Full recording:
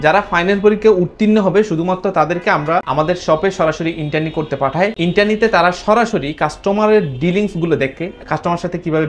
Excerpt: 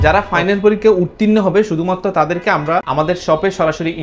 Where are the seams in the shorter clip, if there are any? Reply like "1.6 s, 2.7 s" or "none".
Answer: none